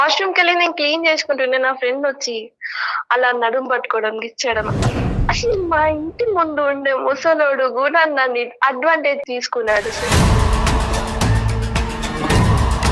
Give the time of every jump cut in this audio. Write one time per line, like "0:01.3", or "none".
0:05.1
0:09.2